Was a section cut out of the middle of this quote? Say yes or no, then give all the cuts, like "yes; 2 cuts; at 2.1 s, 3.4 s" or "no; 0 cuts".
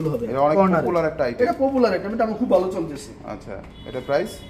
no; 0 cuts